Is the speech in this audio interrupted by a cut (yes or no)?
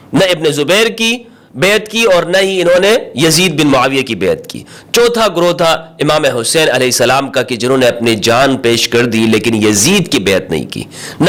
no